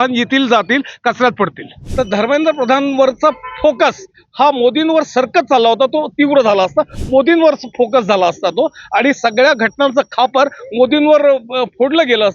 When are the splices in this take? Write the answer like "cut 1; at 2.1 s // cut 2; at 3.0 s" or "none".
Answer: cut 1; at 1.8 s